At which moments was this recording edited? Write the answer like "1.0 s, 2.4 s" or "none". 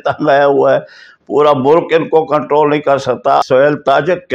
3.4 s